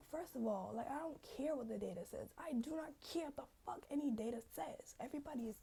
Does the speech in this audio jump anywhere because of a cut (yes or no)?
no